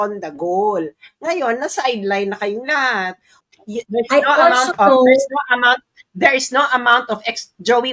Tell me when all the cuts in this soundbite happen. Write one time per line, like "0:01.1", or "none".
0:03.4